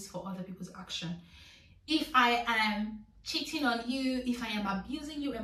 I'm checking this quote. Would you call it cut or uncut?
uncut